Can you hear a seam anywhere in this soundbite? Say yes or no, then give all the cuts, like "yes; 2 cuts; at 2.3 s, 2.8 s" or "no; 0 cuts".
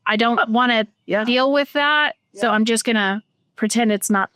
no; 0 cuts